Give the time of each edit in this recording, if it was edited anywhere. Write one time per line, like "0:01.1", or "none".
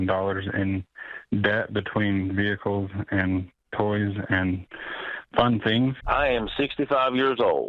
0:06.0